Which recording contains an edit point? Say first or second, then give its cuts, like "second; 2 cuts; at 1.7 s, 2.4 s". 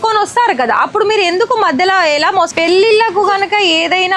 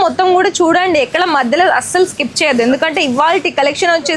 first; 1 cut; at 2.5 s